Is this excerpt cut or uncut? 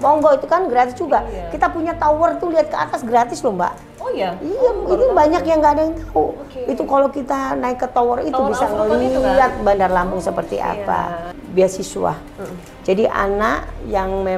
cut